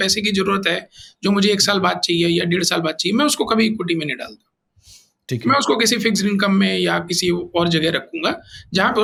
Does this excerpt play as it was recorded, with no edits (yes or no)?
yes